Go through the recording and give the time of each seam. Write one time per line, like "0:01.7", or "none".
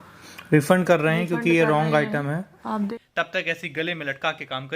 0:02.9